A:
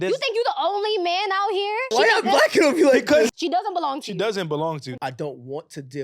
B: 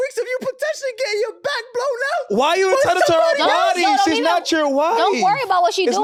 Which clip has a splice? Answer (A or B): A